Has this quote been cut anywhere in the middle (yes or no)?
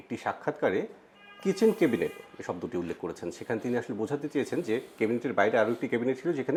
no